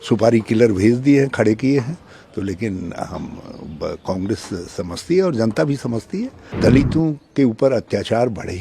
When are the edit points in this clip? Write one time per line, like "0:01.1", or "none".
0:06.4